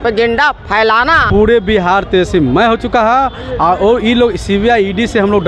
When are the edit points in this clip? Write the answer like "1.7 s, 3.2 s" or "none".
1.2 s

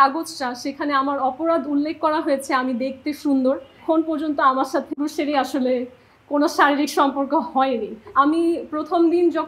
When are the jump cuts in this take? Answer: 3.8 s, 4.9 s, 8.1 s

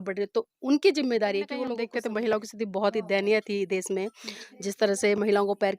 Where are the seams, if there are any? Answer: 1.8 s

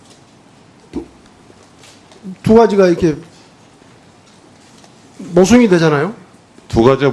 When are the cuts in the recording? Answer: none

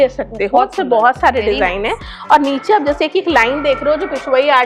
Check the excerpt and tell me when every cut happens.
none

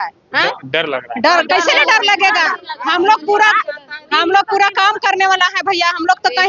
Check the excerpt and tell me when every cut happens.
none

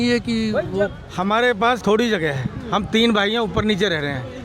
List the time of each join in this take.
1.0 s, 1.8 s

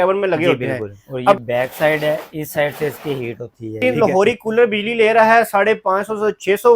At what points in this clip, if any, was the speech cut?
1.4 s, 3.8 s

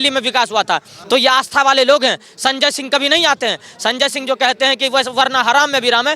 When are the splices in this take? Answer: 0.9 s

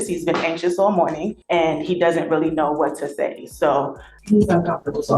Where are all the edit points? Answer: 1.3 s, 4.1 s

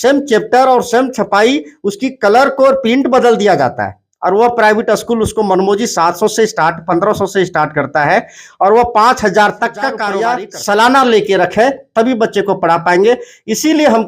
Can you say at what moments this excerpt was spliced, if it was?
10.0 s

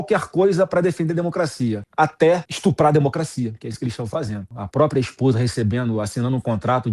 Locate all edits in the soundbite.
2.3 s, 4.5 s

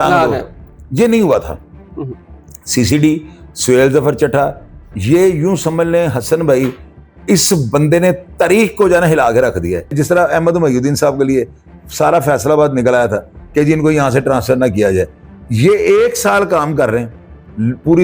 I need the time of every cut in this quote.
9.9 s

